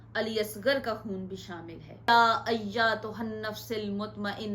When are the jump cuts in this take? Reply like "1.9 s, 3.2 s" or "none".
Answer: 2.1 s

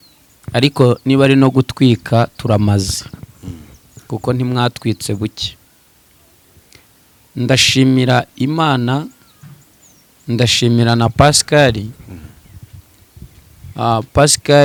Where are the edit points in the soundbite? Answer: none

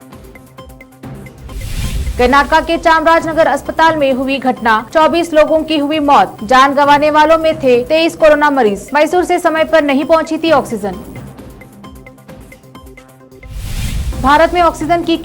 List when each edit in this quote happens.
1.5 s

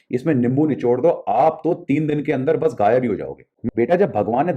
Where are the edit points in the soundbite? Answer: 3.6 s

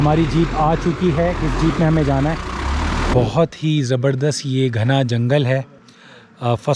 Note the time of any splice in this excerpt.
3.1 s

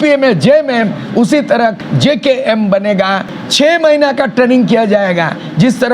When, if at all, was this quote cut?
1.8 s, 3.3 s

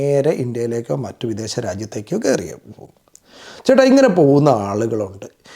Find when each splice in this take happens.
none

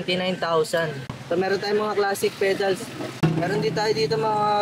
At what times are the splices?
1.0 s, 3.1 s

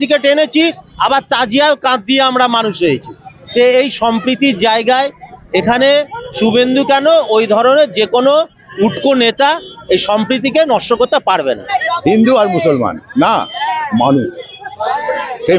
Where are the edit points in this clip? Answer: 11.8 s

